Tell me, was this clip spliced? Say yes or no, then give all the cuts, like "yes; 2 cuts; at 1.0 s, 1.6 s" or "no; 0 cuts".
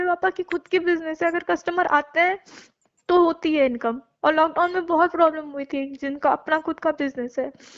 no; 0 cuts